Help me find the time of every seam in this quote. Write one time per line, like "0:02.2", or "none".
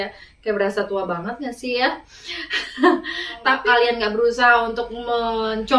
0:03.6

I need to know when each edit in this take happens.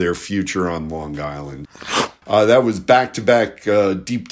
0:01.8

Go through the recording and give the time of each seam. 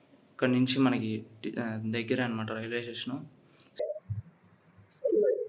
0:03.8

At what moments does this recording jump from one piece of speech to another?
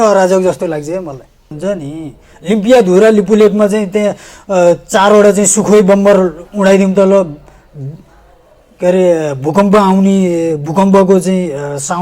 0:01.5

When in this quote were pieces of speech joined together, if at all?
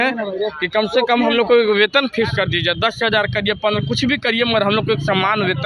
none

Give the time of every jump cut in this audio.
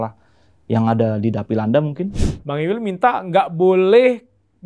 0:02.1

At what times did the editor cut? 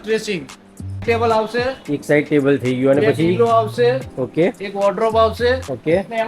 0:01.0

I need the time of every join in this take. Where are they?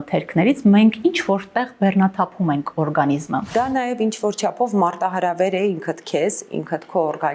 0:03.5

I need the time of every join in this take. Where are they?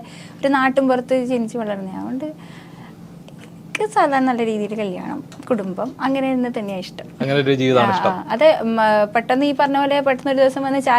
none

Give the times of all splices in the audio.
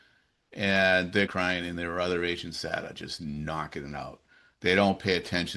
0:01.3

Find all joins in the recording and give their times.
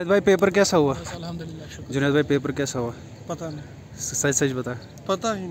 none

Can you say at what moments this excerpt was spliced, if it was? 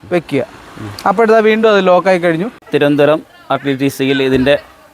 0:02.6

